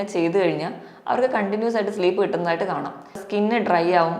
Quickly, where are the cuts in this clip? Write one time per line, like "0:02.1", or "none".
0:03.2